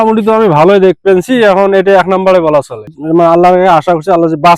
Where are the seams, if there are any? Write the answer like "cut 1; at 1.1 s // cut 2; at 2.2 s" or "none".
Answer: cut 1; at 3.0 s

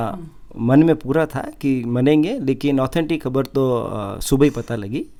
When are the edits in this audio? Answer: none

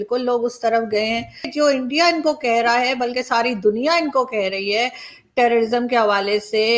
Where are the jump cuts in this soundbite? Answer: cut 1; at 1.4 s

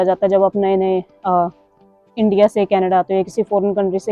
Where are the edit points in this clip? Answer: none

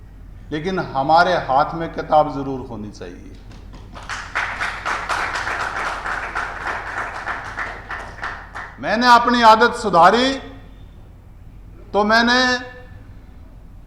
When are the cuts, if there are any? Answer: cut 1; at 8.7 s

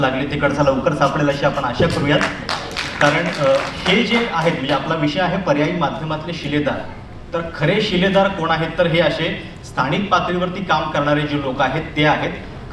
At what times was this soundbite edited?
none

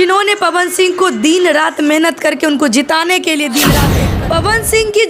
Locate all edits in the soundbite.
cut 1; at 3.8 s

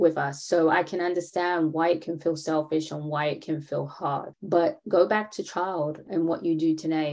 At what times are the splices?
cut 1; at 4.3 s // cut 2; at 6.1 s

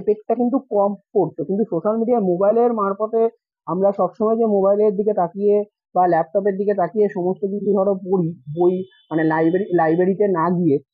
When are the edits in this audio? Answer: none

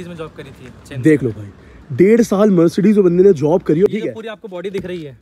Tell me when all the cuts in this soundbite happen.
cut 1; at 3.9 s

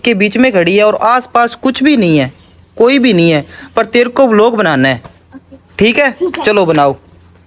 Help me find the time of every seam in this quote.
none

